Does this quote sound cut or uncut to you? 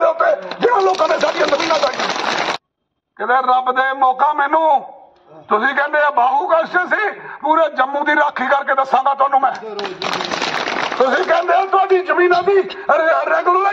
cut